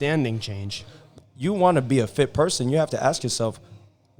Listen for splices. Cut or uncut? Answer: cut